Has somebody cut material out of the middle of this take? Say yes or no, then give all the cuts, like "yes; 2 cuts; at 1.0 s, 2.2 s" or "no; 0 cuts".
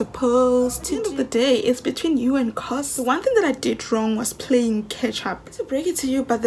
yes; 3 cuts; at 1.1 s, 2.9 s, 5.6 s